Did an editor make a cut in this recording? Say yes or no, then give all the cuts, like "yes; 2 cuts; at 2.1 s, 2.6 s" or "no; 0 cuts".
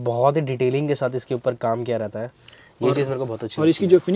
no; 0 cuts